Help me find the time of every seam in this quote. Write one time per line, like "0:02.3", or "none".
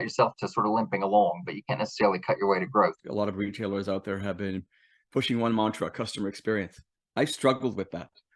0:03.0